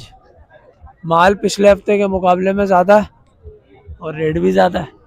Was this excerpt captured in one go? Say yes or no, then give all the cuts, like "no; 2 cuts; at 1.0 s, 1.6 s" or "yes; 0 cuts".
yes; 0 cuts